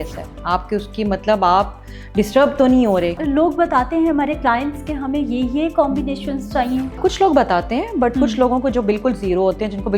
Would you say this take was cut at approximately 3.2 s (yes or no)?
yes